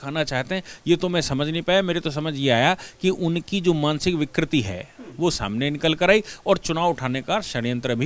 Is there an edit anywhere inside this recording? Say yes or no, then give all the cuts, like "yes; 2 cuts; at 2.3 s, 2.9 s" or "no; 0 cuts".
no; 0 cuts